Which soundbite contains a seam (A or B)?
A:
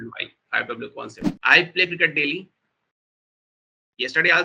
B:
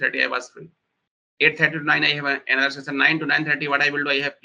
A